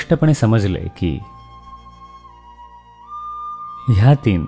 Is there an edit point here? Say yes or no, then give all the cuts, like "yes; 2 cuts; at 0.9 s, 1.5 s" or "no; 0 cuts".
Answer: no; 0 cuts